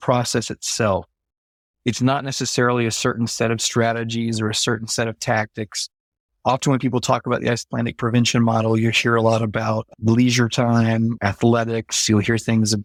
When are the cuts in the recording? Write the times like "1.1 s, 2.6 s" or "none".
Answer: none